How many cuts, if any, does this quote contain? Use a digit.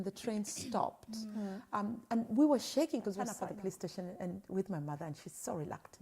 1